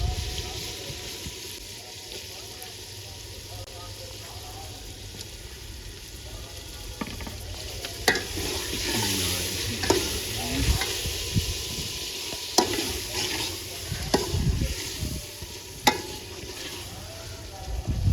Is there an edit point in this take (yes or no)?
no